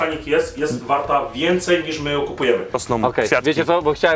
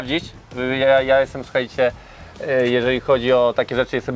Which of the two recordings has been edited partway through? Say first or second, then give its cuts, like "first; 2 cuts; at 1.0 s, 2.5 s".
first; 1 cut; at 2.8 s